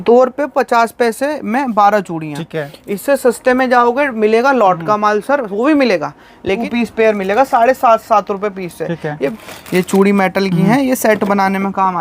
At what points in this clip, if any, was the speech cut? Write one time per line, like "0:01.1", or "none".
0:06.6
0:09.3